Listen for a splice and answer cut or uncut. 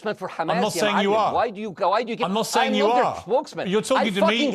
uncut